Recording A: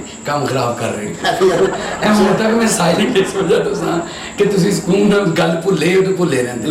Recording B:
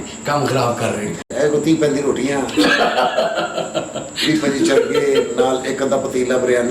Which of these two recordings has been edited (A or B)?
B